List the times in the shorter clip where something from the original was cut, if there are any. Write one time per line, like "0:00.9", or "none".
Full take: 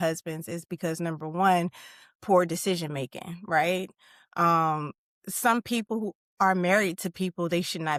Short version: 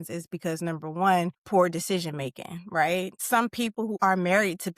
0:01.4
0:03.6